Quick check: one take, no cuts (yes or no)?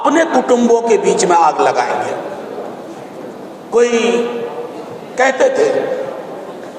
yes